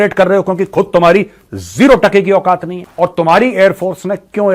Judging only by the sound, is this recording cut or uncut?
cut